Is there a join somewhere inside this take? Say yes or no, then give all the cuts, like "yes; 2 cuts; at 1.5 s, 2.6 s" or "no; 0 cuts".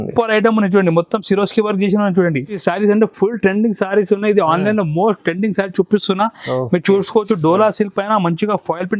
yes; 1 cut; at 2.6 s